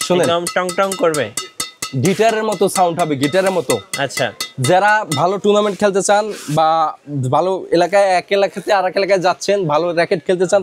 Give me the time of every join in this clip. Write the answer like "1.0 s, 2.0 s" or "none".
none